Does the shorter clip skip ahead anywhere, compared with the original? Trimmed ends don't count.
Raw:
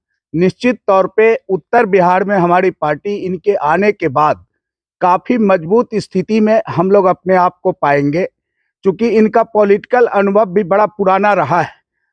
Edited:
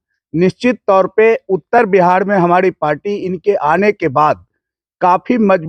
no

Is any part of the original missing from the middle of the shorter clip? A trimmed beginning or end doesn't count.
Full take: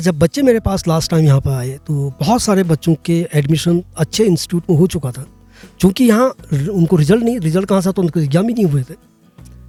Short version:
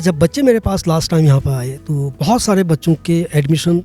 no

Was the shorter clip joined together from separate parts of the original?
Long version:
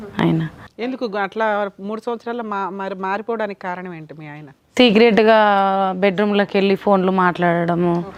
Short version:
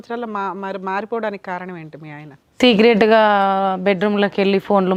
no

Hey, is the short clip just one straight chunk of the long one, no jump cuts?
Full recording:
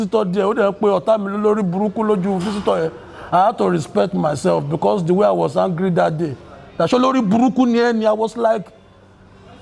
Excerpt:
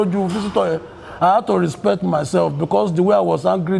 yes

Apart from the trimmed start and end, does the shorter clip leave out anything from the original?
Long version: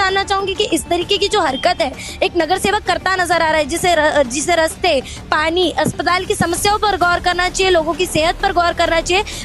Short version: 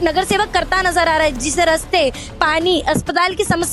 yes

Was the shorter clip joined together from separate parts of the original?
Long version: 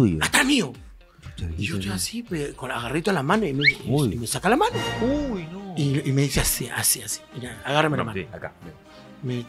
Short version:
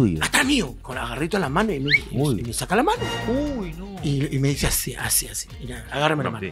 yes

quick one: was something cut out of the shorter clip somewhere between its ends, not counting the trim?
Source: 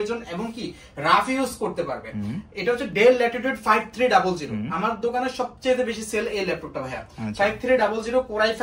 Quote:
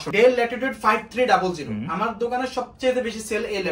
no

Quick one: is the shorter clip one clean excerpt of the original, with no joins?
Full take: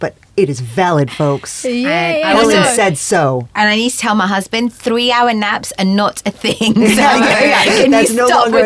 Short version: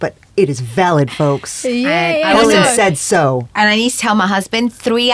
yes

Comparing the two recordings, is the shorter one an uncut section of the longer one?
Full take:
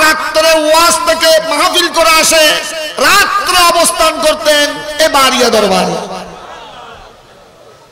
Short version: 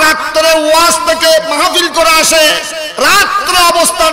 yes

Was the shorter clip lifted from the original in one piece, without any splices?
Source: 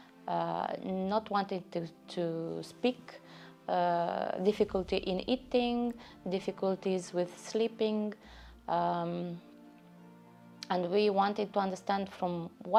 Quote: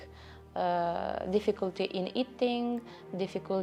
yes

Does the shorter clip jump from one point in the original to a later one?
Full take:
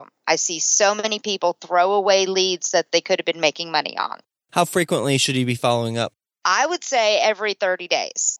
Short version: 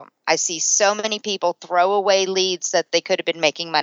no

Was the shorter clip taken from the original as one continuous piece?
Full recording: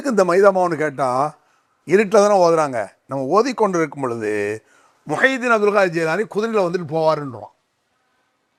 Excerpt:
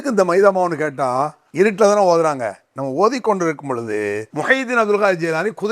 no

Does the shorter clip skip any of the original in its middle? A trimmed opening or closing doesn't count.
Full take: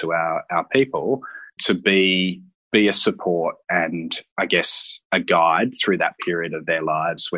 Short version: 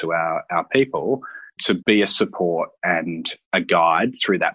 yes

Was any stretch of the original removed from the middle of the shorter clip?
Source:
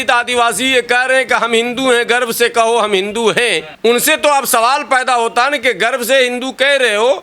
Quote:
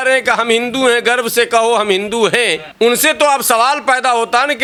no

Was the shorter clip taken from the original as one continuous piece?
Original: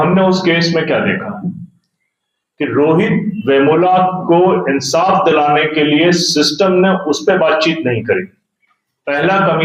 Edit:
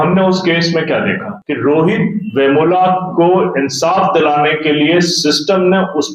no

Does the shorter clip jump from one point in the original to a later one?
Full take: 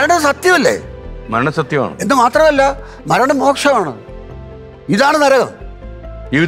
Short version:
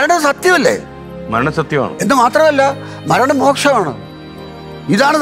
no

